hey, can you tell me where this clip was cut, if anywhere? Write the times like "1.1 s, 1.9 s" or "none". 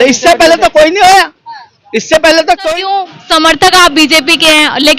2.6 s